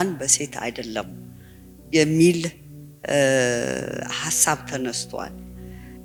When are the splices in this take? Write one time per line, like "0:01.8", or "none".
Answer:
none